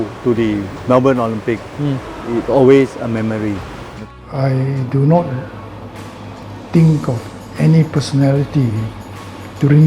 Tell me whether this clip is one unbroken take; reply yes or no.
no